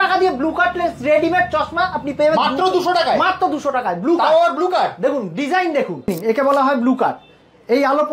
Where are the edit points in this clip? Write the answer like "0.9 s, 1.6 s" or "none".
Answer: 6.1 s